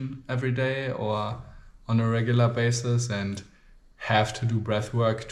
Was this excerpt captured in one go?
yes; 0 cuts

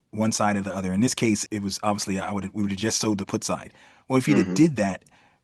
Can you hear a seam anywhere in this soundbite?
yes; 1 cut; at 1.4 s

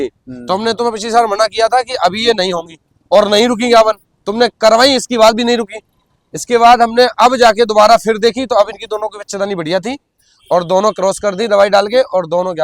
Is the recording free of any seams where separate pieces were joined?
yes; 0 cuts

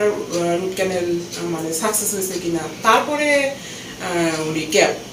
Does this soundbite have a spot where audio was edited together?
no; 0 cuts

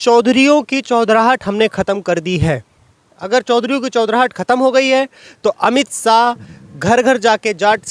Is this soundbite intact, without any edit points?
yes; 0 cuts

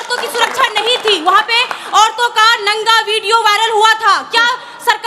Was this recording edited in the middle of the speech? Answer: no; 0 cuts

